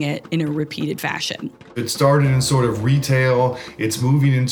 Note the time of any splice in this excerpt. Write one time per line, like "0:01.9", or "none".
0:01.7